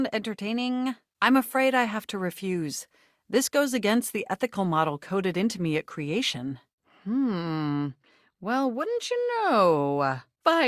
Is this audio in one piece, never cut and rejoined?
yes; 0 cuts

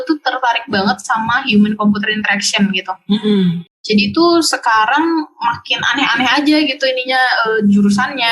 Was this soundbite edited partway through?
yes; 1 cut; at 3.7 s

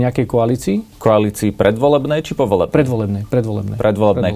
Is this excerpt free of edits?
no; 1 cut; at 0.9 s

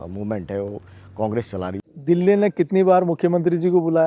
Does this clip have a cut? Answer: yes; 1 cut; at 1.8 s

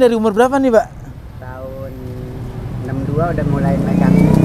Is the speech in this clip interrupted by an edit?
no; 0 cuts

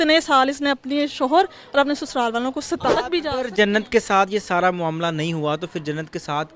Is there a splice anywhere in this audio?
yes; 1 cut; at 3.0 s

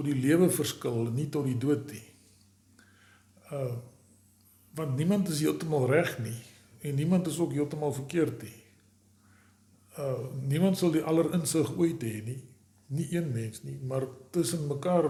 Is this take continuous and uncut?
yes; 0 cuts

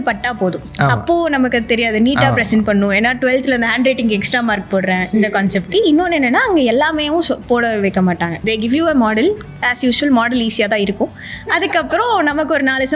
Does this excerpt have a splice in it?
yes; 2 cuts; at 5.7 s, 8.4 s

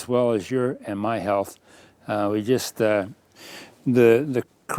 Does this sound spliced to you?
no; 0 cuts

